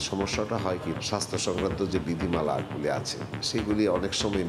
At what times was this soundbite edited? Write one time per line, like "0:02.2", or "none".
0:01.0